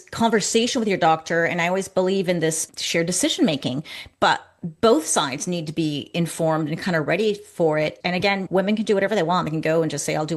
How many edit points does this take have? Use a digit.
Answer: 1